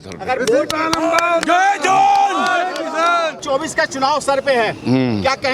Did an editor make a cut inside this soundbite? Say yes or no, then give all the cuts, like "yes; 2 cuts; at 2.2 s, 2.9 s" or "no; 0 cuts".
yes; 1 cut; at 3.4 s